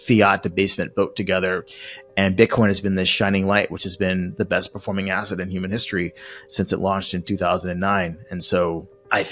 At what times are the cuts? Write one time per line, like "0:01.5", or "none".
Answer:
none